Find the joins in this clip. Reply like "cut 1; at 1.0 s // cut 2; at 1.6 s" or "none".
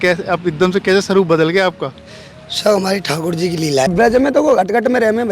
cut 1; at 3.9 s